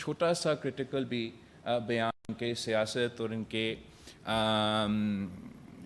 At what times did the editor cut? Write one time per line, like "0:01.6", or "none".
none